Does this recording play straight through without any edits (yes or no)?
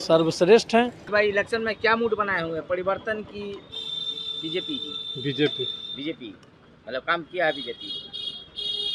no